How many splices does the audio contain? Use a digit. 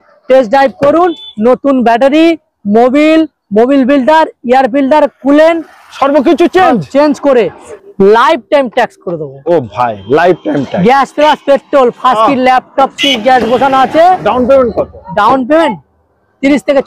1